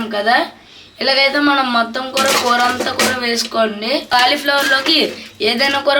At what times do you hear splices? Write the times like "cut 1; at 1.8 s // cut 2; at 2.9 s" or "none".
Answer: cut 1; at 4.1 s